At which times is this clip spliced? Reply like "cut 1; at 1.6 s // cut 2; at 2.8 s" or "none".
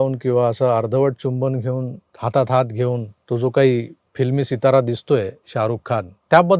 none